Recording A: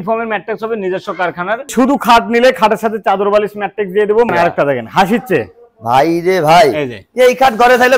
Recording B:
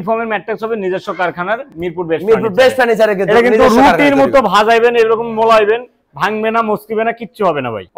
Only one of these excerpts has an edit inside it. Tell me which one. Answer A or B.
A